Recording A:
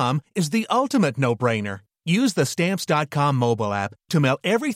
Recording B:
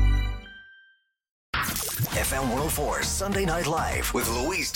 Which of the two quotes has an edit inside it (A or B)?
B